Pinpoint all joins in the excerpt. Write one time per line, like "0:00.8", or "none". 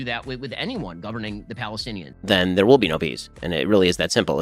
0:02.1